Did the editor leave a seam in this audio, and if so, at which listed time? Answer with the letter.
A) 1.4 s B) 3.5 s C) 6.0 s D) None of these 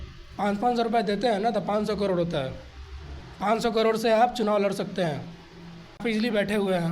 C